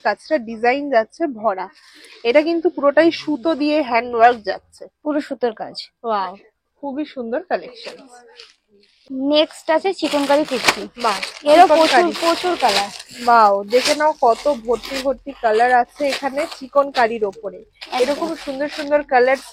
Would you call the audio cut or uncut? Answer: uncut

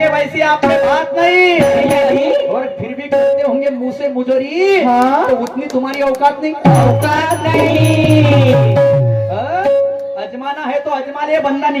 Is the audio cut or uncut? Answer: uncut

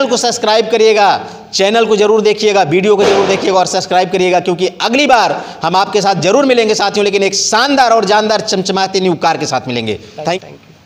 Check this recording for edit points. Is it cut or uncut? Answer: uncut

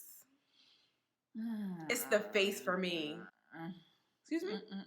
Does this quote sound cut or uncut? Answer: cut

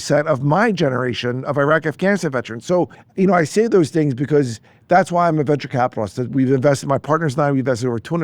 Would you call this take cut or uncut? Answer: cut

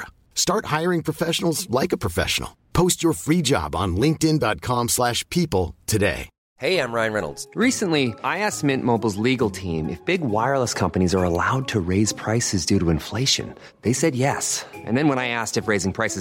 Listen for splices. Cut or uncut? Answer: cut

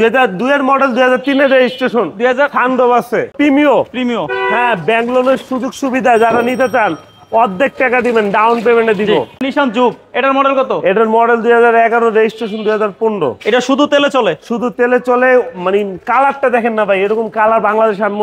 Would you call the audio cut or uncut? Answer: cut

